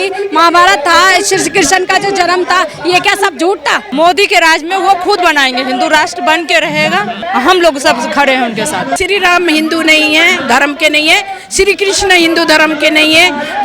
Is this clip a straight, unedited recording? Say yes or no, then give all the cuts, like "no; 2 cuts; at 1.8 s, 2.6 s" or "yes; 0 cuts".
no; 3 cuts; at 3.8 s, 7.2 s, 9.0 s